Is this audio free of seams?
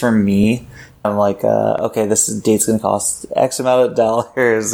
no; 1 cut; at 1.0 s

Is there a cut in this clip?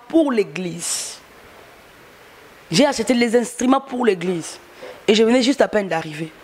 no; 0 cuts

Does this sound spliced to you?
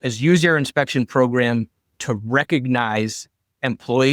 no; 0 cuts

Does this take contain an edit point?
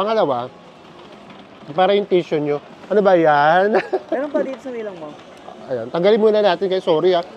no; 0 cuts

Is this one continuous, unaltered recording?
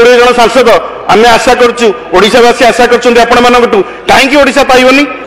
yes; 0 cuts

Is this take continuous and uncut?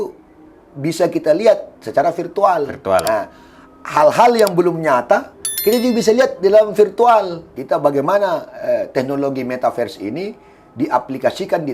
no; 1 cut; at 7.5 s

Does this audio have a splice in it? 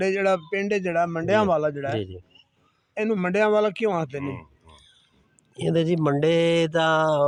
no; 0 cuts

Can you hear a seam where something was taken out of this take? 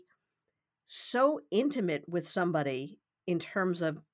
no; 0 cuts

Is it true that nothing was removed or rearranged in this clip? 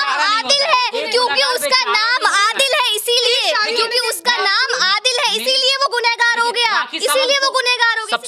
yes; 0 cuts

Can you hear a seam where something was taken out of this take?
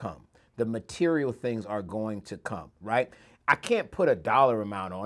no; 0 cuts

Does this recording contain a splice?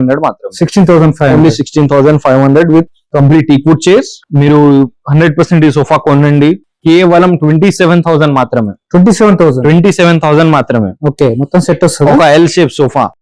yes; 1 cut; at 4.2 s

